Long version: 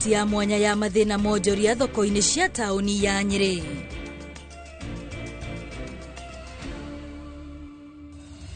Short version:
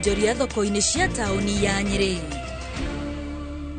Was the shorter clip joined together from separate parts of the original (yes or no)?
yes